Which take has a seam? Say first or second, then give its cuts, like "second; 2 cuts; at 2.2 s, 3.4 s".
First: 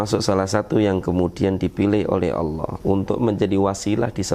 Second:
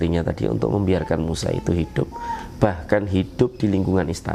first; 1 cut; at 2.7 s